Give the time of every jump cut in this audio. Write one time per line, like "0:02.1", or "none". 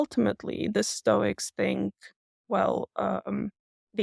none